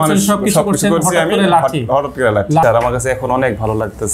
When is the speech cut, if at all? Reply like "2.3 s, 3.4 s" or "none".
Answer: 2.6 s